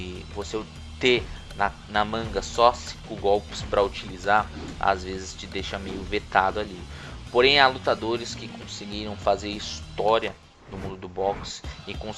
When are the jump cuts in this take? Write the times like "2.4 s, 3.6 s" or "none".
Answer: none